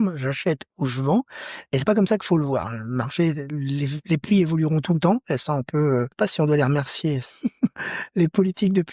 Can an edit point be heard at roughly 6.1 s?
yes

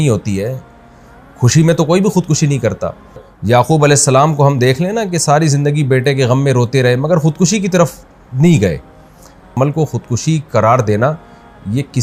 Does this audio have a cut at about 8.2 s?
no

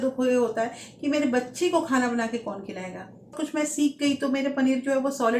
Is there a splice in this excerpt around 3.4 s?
yes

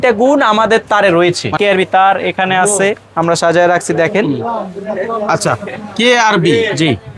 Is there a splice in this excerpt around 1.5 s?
yes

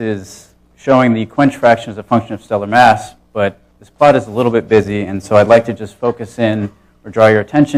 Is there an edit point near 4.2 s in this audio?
no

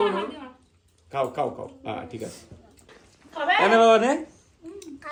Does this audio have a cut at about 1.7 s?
no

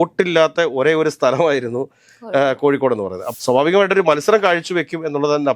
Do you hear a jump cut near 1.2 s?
no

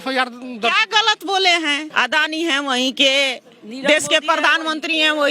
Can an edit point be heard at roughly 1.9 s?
yes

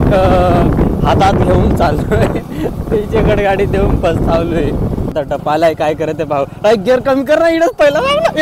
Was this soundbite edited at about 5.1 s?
yes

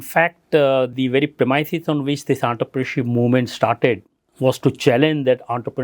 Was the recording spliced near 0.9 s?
yes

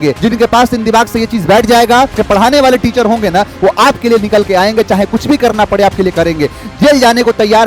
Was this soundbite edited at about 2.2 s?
yes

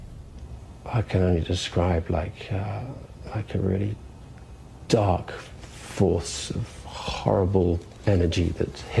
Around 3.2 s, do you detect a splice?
no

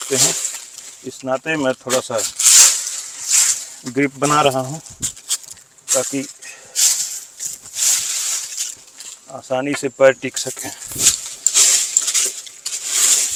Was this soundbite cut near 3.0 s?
no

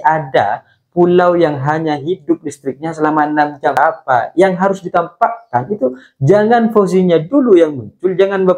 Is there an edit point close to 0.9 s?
no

